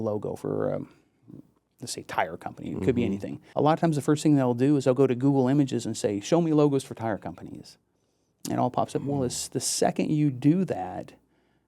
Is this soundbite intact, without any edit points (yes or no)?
no